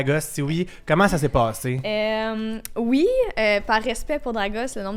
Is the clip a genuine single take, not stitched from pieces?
yes; 0 cuts

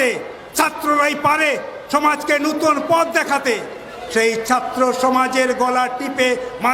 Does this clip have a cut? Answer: no; 0 cuts

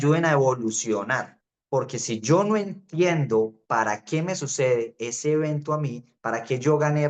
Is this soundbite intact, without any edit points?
no; 1 cut; at 1.5 s

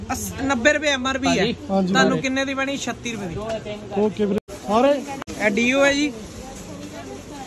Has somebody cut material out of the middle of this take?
yes; 2 cuts; at 4.4 s, 5.1 s

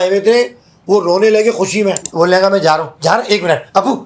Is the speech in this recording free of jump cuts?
no; 1 cut; at 2.0 s

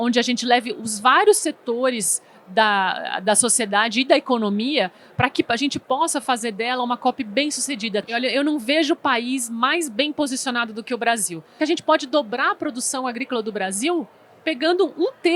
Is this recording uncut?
no; 2 cuts; at 8.1 s, 11.5 s

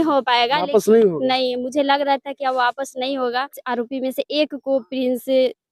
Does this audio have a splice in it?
yes; 1 cut; at 3.6 s

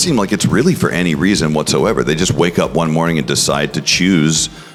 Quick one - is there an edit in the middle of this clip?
no; 0 cuts

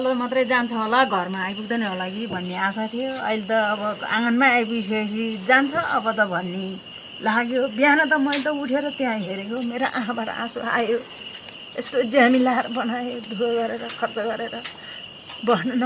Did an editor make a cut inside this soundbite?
no; 0 cuts

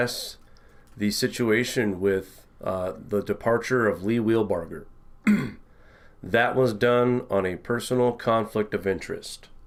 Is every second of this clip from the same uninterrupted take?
yes; 0 cuts

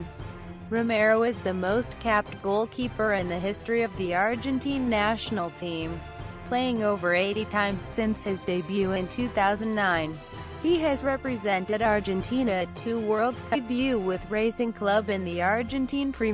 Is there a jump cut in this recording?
no; 0 cuts

